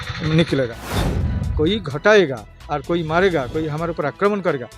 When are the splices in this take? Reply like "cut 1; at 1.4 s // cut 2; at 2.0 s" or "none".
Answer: cut 1; at 1.0 s